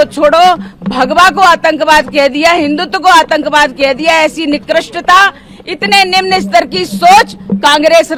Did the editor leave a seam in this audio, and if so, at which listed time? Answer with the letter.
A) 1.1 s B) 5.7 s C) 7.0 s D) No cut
D